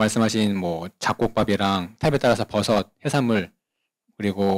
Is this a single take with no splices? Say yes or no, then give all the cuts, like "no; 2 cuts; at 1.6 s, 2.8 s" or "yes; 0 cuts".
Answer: yes; 0 cuts